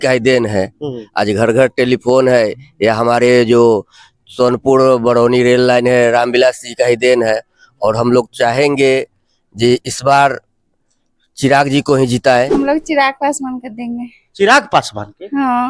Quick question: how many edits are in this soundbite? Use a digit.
1